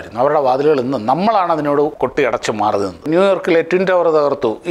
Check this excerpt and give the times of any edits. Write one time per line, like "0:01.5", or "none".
0:01.9
0:03.1